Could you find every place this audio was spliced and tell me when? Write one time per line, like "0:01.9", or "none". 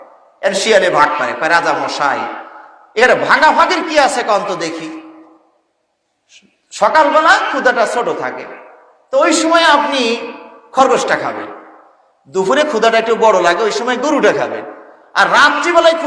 none